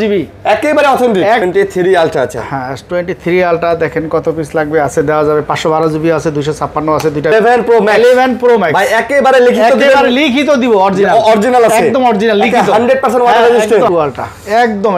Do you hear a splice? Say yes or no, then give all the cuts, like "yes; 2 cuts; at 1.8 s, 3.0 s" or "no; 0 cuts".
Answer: yes; 3 cuts; at 1.4 s, 7.3 s, 13.9 s